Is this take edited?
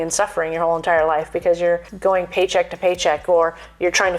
yes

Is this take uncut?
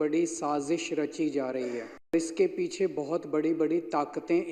no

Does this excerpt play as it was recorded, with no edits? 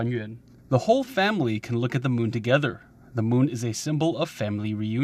yes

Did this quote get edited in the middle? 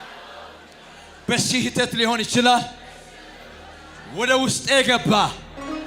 no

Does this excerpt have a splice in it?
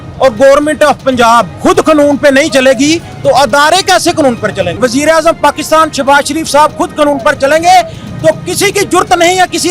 yes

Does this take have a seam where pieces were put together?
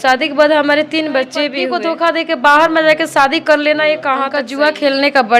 yes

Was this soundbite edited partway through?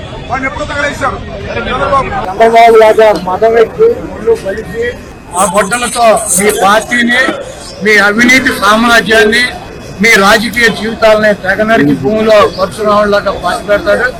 no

